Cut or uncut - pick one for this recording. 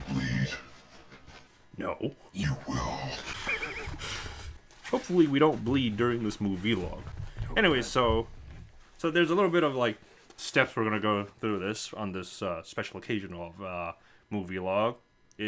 uncut